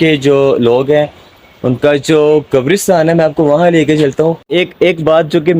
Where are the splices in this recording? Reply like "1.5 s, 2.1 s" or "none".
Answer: 4.4 s

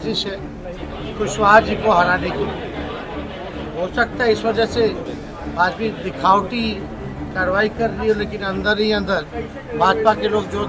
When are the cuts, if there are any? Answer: none

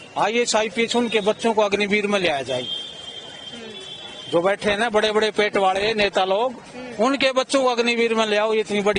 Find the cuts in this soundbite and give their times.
none

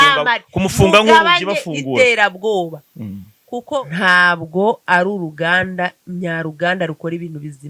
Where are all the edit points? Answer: 3.6 s

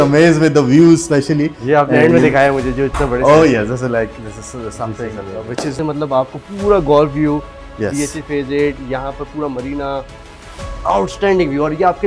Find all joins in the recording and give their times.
5.8 s

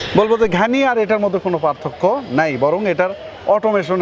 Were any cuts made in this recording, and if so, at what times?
none

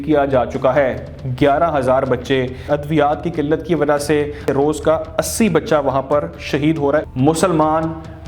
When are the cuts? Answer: 2.7 s, 4.4 s, 7.1 s

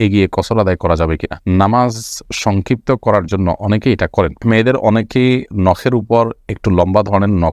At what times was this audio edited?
4.4 s

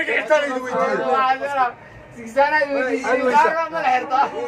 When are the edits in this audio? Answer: none

